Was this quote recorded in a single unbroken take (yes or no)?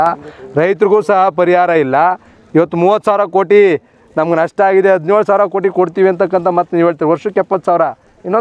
no